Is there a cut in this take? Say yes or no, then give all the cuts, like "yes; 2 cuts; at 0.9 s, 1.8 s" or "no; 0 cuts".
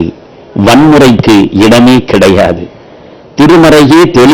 no; 0 cuts